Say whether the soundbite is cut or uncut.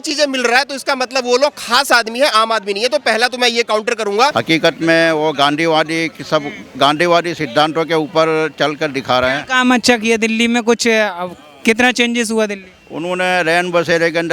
cut